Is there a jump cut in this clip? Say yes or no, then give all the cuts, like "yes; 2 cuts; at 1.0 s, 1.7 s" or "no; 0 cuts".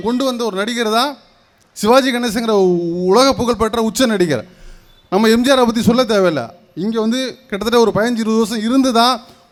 no; 0 cuts